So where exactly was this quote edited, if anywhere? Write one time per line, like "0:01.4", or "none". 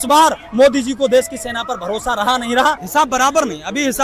0:02.8